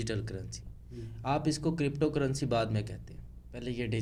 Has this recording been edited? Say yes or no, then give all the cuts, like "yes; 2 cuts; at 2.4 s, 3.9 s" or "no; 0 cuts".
no; 0 cuts